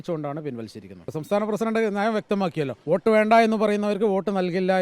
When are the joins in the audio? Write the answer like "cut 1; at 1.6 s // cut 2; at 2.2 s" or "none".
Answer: cut 1; at 1.2 s // cut 2; at 2.8 s